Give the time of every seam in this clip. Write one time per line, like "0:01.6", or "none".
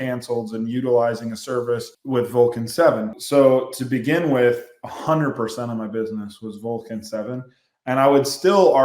0:01.9
0:03.1

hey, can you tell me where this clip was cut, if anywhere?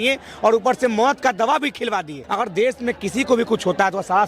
0:02.2

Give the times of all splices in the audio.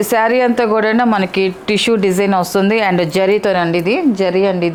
none

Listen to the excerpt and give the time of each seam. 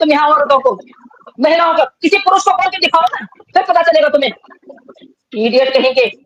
none

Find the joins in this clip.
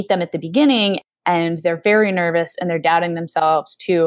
0:01.0

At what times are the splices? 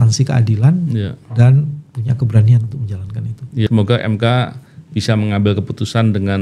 0:03.7

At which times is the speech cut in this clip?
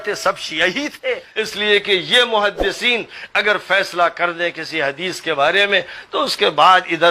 0:01.3

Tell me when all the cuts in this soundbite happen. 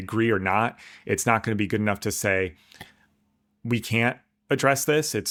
none

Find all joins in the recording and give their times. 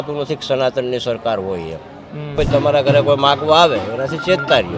0:02.3

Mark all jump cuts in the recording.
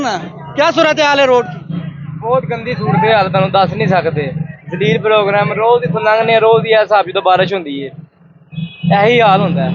none

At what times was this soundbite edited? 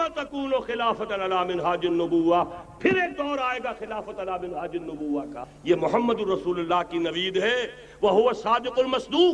0:05.5

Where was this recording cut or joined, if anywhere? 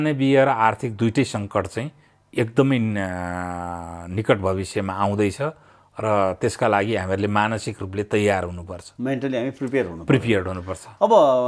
none

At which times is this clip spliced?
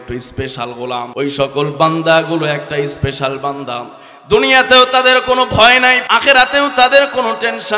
0:01.1
0:06.1

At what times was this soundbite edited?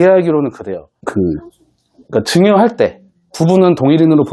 0:00.9

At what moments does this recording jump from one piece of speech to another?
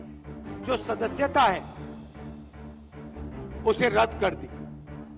0:01.6
0:03.5

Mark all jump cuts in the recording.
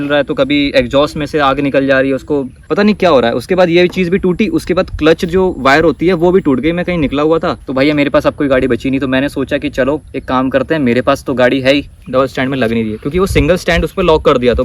0:02.6
0:07.6
0:11.9

